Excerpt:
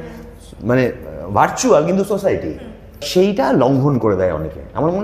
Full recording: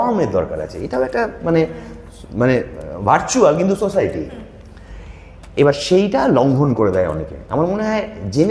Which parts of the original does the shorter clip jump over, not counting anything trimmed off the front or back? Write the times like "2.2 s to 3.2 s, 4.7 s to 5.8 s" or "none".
4.8 s to 5.8 s